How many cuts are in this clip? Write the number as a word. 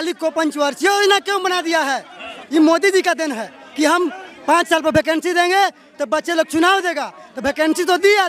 zero